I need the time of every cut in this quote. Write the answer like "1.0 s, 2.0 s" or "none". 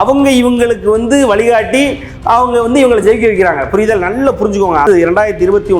4.8 s

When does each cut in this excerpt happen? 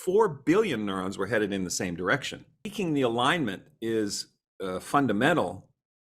2.6 s

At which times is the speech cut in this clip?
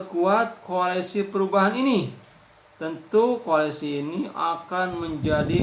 none

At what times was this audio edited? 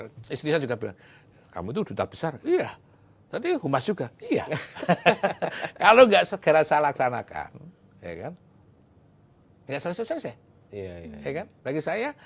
none

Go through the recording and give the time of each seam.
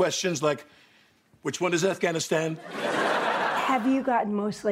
3.6 s

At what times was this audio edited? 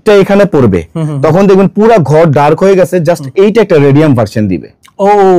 none

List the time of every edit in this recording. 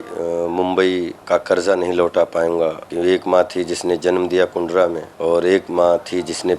1.2 s, 2.8 s, 5.1 s

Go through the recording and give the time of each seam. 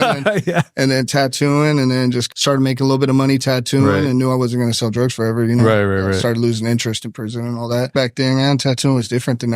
2.3 s, 7.9 s

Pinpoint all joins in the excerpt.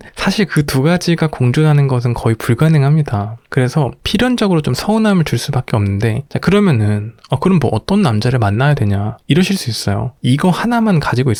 none

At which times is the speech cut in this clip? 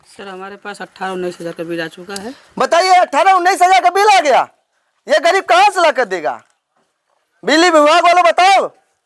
none

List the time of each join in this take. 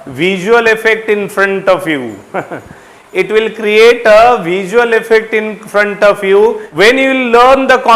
6.6 s

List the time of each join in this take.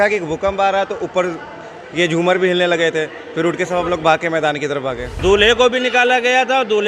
5.1 s

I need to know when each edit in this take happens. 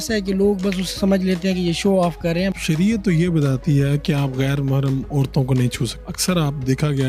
2.5 s, 6.1 s

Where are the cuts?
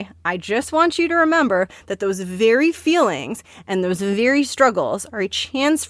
none

